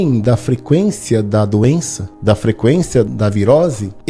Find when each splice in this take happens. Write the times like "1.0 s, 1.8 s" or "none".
3.1 s